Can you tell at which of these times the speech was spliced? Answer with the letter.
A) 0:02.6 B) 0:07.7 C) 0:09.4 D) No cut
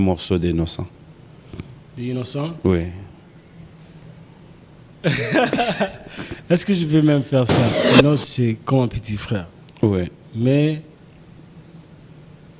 B